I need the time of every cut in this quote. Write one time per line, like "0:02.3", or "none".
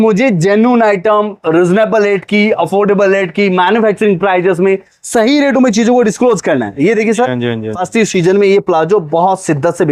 none

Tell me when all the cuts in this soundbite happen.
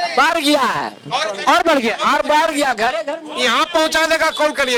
none

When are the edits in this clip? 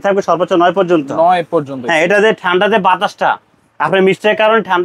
none

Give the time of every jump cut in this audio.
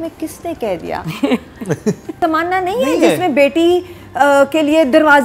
0:02.2

